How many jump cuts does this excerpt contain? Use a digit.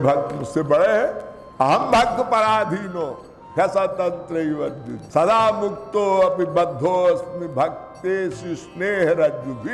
0